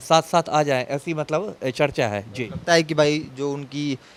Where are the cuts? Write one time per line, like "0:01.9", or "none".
none